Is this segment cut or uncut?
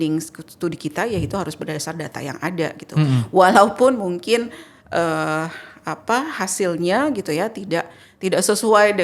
uncut